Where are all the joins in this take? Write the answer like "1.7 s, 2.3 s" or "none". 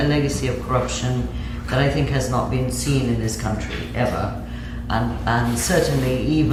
none